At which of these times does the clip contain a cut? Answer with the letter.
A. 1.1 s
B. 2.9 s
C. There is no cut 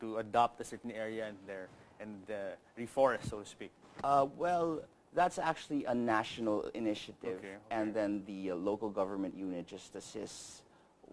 C